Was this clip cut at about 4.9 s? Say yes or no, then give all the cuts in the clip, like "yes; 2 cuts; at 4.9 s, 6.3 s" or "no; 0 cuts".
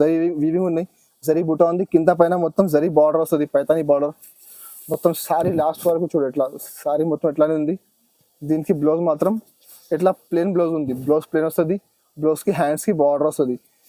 no; 0 cuts